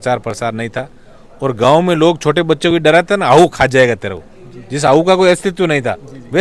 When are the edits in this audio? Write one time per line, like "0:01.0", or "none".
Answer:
none